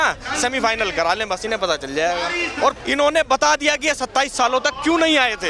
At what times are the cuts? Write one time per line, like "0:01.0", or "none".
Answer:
0:02.8